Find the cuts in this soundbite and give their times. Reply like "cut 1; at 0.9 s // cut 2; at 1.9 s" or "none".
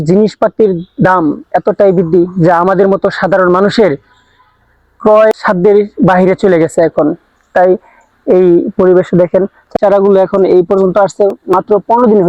cut 1; at 5.3 s // cut 2; at 9.7 s